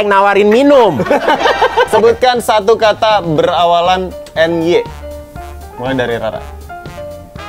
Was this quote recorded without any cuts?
no; 1 cut; at 1.9 s

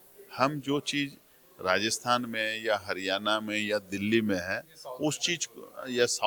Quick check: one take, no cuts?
yes; 0 cuts

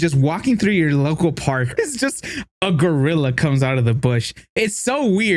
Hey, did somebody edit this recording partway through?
yes; 1 cut; at 1.7 s

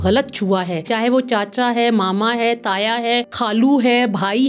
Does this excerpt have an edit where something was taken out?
yes; 2 cuts; at 0.9 s, 3.3 s

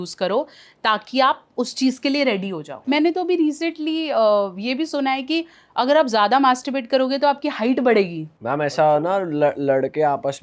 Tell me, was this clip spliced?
yes; 1 cut; at 2.7 s

